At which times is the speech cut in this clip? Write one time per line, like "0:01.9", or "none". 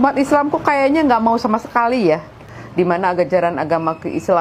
0:02.6